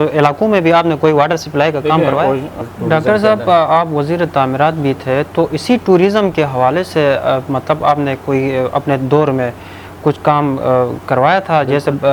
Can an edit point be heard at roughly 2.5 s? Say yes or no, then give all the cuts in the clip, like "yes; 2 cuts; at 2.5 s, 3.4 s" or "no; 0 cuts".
yes; 1 cut; at 2.5 s